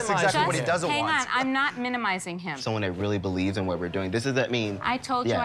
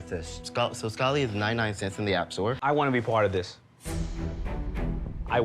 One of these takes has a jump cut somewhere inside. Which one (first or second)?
second